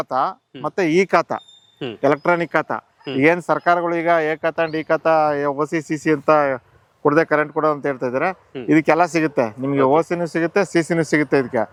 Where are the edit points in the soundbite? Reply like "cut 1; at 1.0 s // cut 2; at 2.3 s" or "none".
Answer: none